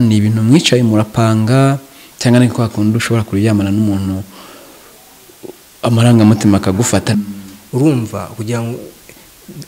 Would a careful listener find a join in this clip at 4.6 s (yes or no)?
no